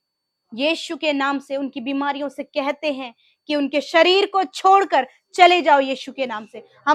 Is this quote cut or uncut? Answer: uncut